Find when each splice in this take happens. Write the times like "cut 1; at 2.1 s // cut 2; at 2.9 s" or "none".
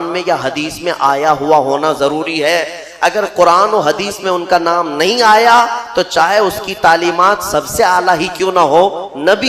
none

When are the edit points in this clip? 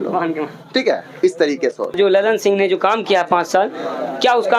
cut 1; at 1.9 s

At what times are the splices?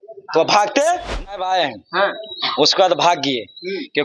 cut 1; at 1.3 s

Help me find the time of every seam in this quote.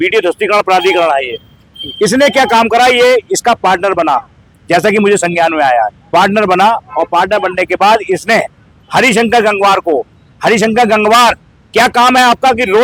none

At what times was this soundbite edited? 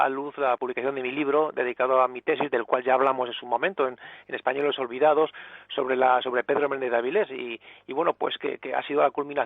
cut 1; at 1.1 s

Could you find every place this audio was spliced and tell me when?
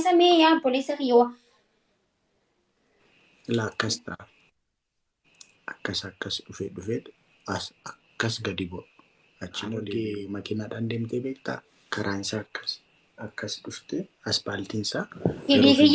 cut 1; at 9.8 s

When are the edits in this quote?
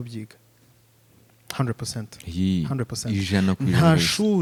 none

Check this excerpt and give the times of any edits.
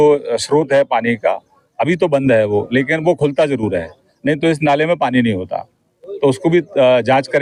none

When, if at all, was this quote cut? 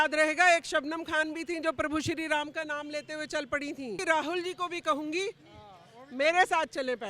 cut 1; at 4.0 s

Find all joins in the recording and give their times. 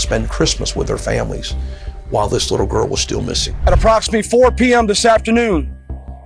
cut 1; at 3.4 s

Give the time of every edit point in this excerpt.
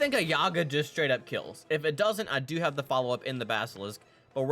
none

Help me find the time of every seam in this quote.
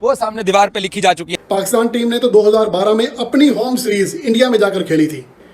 cut 1; at 1.3 s

